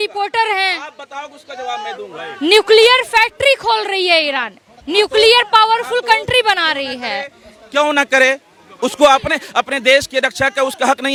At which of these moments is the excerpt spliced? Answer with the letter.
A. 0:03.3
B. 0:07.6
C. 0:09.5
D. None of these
D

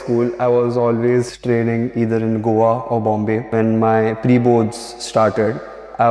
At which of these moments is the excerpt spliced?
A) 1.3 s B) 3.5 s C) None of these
B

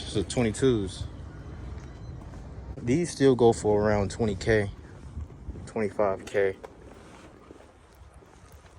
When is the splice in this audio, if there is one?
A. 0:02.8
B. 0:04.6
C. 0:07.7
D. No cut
A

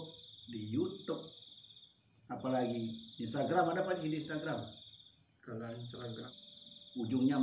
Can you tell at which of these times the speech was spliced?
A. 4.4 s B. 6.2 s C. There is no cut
B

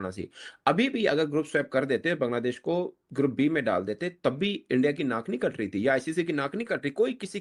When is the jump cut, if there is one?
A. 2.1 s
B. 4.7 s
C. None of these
C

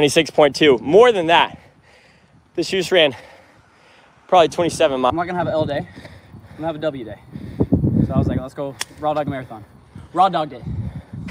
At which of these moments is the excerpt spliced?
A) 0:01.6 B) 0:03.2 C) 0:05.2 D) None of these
D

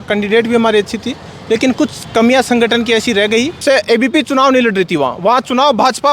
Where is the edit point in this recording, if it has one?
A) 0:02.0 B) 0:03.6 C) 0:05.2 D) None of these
B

